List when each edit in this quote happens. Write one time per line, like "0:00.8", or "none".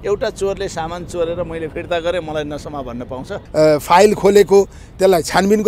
0:03.4